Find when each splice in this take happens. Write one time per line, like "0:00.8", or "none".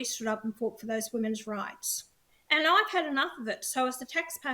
0:02.3